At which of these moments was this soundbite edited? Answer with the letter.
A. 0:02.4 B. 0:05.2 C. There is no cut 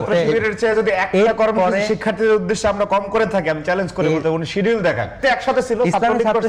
B